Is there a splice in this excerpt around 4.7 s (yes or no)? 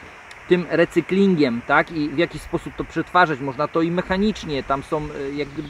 no